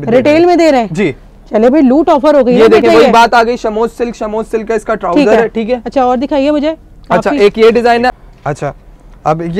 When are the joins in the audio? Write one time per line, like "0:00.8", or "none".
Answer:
none

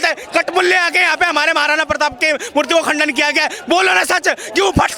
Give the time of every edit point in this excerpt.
none

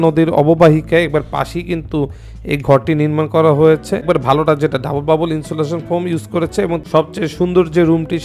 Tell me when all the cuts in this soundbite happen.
0:04.0
0:06.8

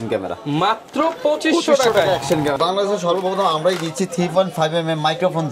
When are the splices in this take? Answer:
0:02.6

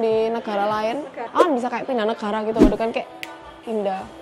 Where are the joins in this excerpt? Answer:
0:01.2

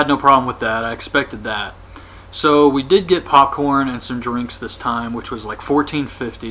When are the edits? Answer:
0:01.0

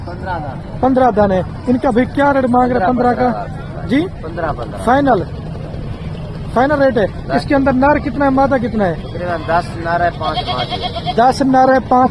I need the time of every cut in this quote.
none

